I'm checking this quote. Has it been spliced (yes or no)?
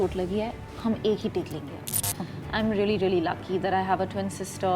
yes